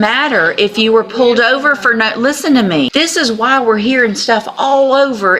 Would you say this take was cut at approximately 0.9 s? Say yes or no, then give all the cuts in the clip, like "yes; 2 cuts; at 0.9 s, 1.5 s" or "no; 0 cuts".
no; 1 cut; at 2.9 s